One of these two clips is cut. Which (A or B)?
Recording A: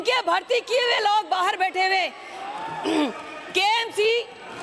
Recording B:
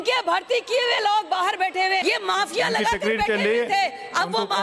B